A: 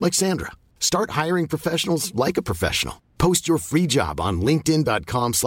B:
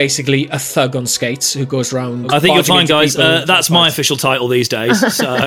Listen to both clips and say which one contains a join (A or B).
B